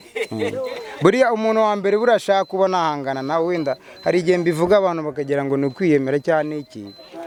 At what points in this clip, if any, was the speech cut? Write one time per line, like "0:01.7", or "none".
none